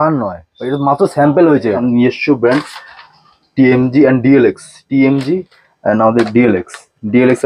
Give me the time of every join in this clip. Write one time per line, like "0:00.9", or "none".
0:01.8